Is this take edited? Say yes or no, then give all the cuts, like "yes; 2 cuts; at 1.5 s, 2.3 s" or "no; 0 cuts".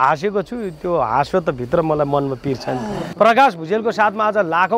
yes; 1 cut; at 3.0 s